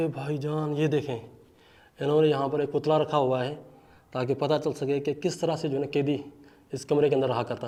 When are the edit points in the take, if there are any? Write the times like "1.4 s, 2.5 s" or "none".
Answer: none